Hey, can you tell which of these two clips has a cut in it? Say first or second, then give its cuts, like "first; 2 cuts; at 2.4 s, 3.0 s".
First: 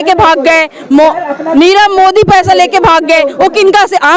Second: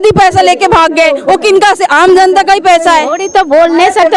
second; 1 cut; at 3.2 s